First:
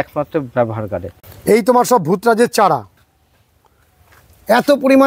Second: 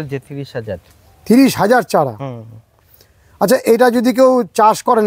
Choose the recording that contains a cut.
first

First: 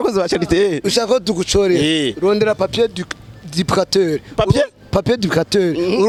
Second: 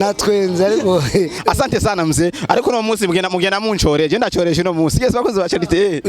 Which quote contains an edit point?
second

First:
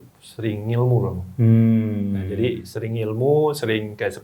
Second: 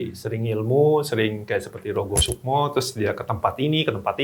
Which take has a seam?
first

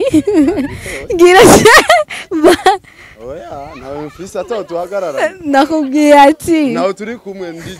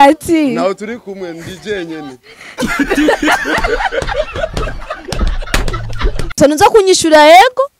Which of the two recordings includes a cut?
second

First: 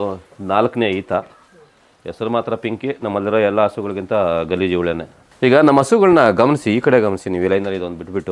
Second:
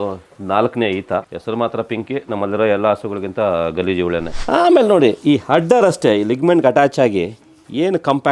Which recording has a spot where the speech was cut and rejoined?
second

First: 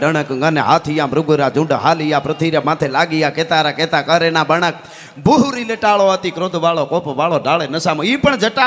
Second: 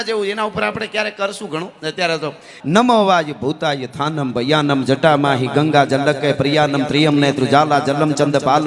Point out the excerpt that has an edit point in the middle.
second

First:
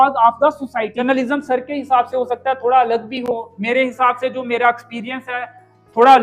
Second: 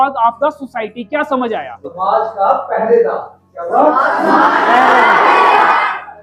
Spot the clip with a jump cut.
first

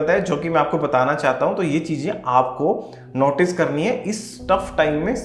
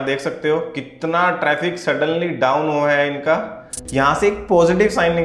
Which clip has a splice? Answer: second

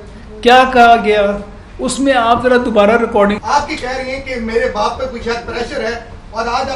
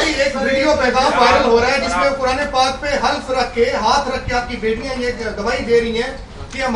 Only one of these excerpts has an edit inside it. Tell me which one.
first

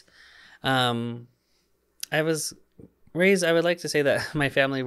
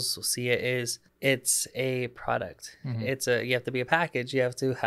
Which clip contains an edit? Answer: second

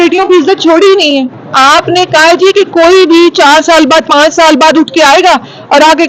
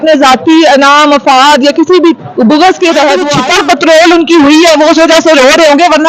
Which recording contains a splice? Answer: second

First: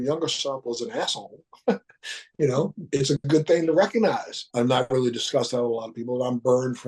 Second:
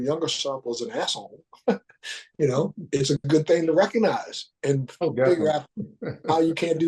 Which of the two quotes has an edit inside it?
first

